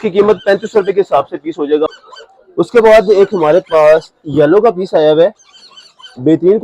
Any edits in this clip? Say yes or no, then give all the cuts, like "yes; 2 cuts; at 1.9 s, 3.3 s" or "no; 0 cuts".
yes; 1 cut; at 2.0 s